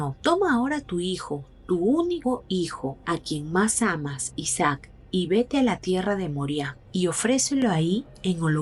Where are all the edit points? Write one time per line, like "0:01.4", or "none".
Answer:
none